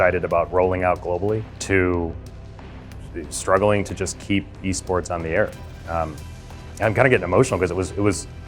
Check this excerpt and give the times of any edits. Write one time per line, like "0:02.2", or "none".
0:01.5